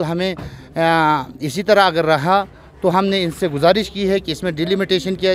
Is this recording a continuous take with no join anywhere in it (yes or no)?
yes